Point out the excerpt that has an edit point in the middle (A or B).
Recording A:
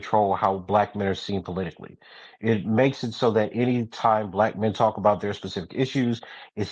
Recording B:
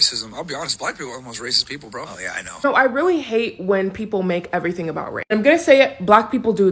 B